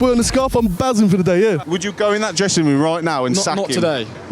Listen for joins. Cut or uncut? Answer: cut